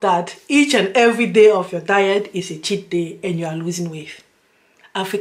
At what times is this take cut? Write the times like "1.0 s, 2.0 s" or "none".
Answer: none